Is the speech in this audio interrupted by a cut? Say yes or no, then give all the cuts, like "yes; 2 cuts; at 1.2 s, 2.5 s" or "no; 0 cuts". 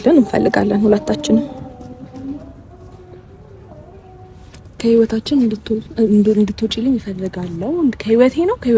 no; 0 cuts